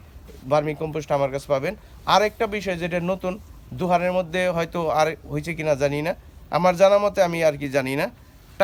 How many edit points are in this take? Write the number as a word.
zero